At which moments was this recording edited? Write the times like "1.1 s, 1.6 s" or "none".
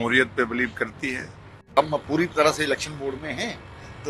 1.8 s